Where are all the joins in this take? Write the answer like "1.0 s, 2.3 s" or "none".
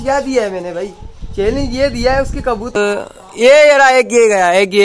2.7 s